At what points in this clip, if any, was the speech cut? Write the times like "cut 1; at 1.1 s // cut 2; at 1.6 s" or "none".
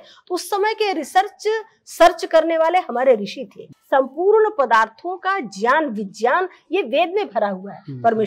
cut 1; at 3.7 s